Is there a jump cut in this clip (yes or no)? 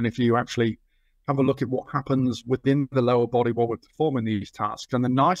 no